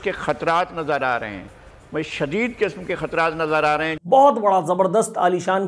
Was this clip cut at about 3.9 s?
yes; 1 cut; at 3.9 s

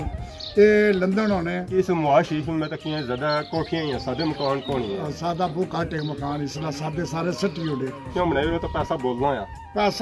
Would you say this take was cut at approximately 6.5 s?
no; 2 cuts; at 1.7 s, 8.1 s

